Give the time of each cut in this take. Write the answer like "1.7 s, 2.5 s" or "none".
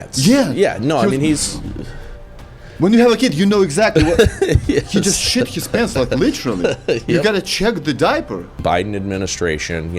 8.6 s